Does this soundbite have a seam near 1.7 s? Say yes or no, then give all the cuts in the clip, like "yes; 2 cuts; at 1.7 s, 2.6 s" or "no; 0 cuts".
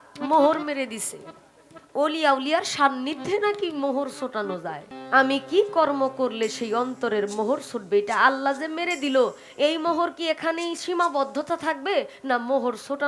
no; 1 cut; at 4.9 s